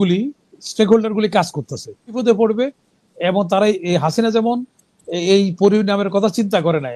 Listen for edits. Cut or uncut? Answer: cut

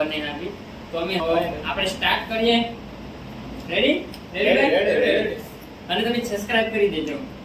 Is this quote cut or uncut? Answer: cut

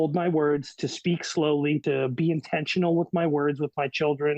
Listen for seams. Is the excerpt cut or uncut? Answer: cut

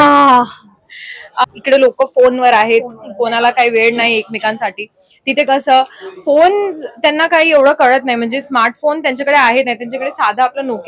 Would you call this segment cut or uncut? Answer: cut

